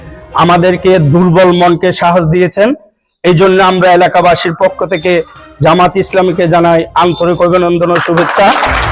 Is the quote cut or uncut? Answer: uncut